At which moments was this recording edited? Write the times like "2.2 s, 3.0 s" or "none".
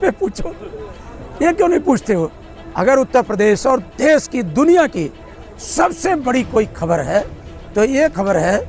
none